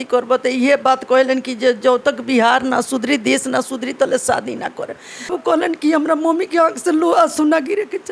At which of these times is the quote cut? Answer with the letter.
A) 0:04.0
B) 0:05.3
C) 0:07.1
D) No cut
B